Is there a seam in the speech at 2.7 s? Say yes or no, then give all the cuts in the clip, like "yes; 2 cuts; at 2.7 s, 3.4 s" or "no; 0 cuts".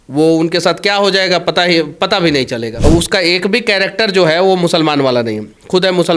yes; 1 cut; at 2.7 s